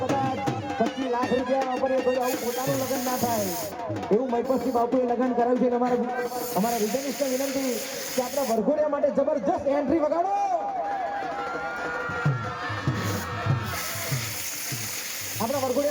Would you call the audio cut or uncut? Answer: uncut